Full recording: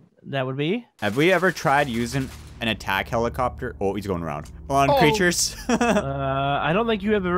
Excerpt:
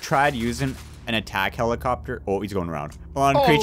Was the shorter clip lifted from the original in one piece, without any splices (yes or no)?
yes